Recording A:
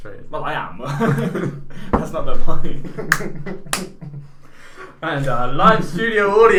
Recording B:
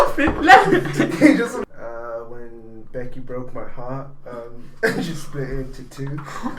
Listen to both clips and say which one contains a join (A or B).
B